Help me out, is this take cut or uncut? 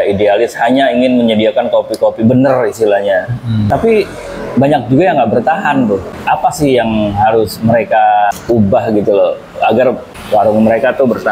cut